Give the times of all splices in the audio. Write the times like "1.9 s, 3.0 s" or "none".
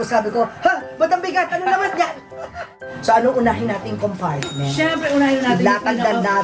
2.9 s